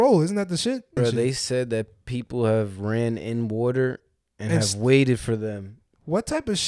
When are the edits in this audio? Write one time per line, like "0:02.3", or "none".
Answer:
0:01.0